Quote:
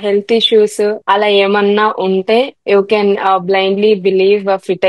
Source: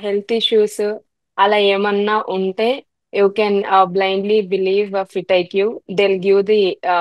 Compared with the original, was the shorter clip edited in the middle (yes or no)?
yes